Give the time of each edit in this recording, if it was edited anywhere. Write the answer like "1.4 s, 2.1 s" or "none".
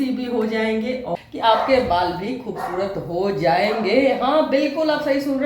1.1 s